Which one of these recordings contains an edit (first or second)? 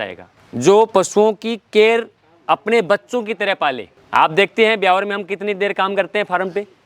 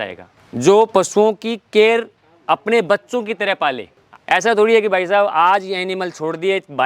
second